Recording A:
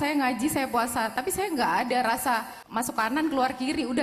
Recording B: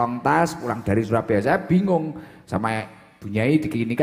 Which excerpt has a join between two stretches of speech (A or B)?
A